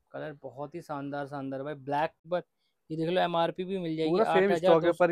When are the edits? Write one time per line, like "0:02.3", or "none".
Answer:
0:02.2

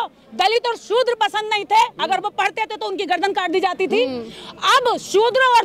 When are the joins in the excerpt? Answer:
none

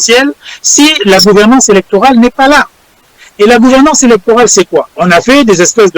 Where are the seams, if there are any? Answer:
0:04.9

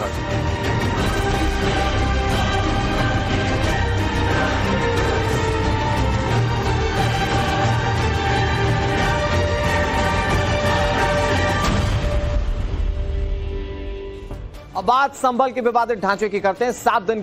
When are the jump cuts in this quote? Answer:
0:05.0

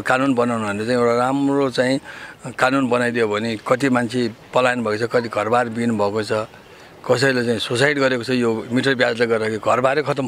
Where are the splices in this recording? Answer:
none

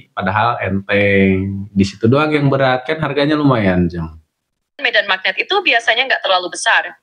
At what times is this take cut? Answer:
0:04.8

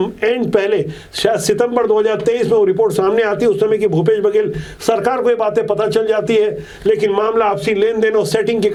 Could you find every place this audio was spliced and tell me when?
none

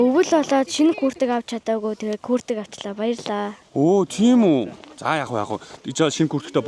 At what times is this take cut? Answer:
none

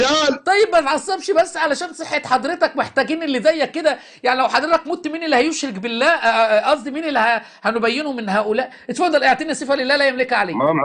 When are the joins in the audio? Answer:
none

